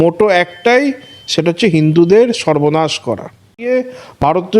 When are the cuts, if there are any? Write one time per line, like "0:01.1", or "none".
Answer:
0:03.5